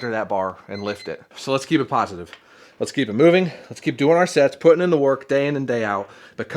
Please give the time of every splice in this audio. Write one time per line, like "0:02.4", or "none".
0:01.3